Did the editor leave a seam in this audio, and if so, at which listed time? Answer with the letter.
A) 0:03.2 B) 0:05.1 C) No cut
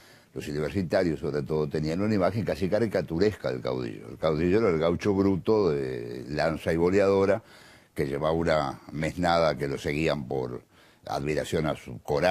B